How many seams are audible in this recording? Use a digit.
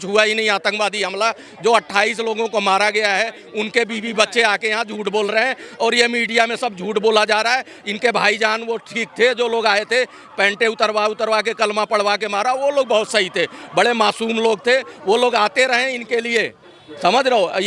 0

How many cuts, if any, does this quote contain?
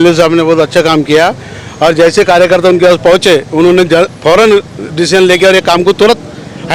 0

